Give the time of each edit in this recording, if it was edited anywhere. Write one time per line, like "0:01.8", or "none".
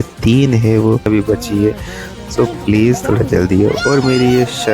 0:01.0